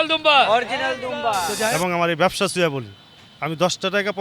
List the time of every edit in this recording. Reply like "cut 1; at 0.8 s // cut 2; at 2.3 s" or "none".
cut 1; at 1.7 s